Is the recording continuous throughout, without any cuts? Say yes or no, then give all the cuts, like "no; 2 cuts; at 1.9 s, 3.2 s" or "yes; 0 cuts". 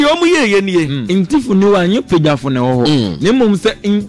no; 1 cut; at 1.0 s